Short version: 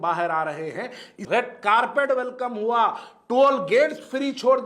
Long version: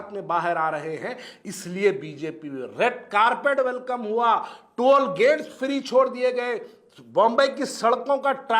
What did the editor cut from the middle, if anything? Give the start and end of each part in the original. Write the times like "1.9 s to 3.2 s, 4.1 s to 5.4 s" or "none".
1.4 s to 2.6 s